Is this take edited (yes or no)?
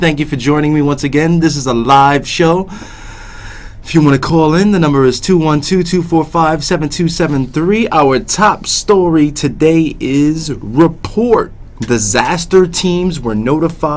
no